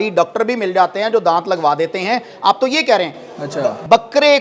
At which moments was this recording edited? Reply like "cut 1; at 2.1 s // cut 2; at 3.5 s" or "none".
none